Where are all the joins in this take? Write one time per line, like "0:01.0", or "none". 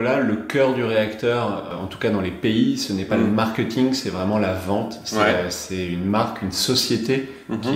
0:01.7

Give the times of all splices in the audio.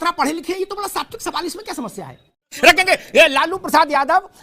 0:02.3

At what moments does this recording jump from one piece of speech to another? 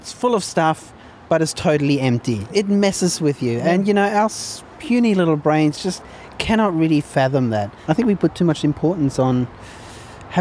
0:02.5
0:07.7

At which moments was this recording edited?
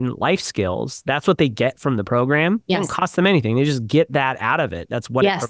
none

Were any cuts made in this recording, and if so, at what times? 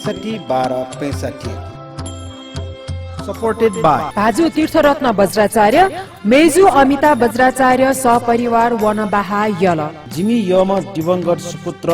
0:03.0

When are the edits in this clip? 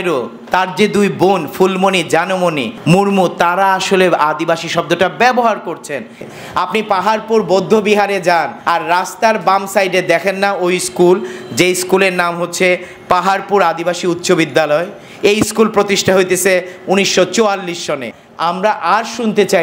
0:02.7
0:06.2
0:08.6
0:18.2

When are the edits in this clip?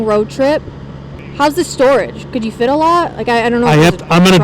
0:01.2

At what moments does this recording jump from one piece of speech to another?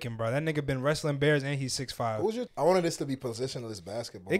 0:02.5

